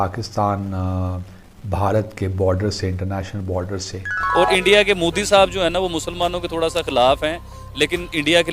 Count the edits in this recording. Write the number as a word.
one